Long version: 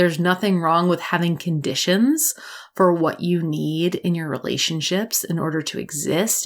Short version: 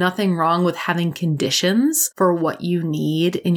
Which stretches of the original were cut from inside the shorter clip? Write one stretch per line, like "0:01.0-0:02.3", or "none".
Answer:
0:02.3-0:02.6